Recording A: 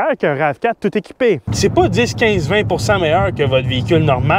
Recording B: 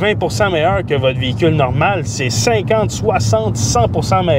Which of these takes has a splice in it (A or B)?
A